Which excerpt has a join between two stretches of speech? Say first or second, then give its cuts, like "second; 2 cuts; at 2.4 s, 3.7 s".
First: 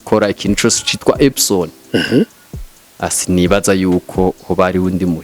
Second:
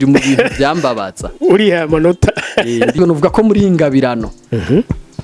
second; 1 cut; at 3.0 s